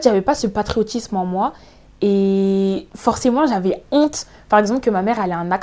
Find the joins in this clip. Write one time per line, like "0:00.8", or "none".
0:02.9